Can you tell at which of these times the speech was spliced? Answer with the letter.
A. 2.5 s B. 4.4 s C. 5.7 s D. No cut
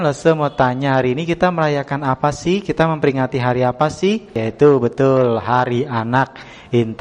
B